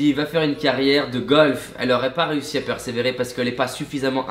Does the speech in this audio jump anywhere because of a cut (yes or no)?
no